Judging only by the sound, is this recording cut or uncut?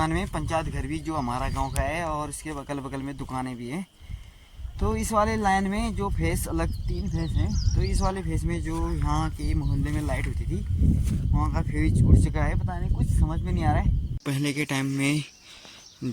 cut